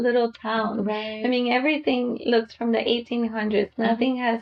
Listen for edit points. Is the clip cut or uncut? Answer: uncut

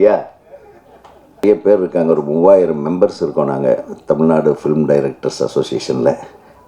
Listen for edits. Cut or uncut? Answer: cut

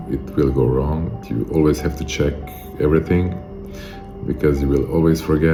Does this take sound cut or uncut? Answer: uncut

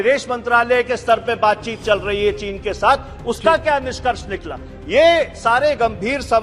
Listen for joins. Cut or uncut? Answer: uncut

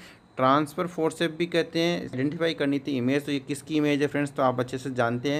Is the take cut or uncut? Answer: cut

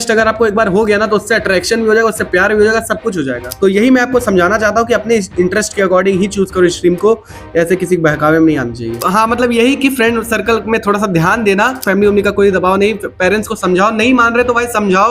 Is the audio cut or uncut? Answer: cut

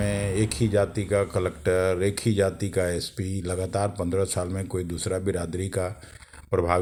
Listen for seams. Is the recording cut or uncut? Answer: uncut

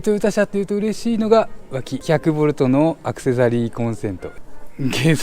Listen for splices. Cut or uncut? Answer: cut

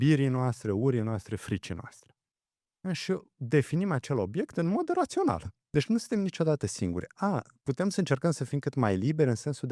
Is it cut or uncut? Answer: cut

